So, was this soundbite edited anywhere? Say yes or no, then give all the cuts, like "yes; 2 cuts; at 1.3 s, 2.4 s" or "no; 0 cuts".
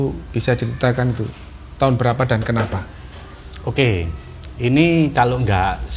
no; 0 cuts